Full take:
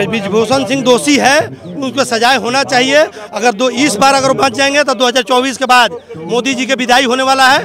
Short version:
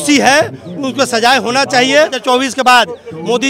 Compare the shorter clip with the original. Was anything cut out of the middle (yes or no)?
yes